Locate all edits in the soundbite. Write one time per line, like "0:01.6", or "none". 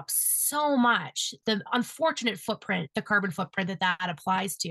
0:01.3

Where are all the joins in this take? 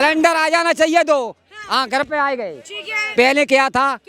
none

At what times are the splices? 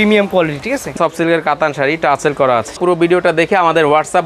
0:01.0
0:02.8

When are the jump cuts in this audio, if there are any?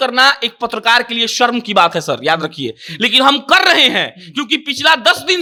none

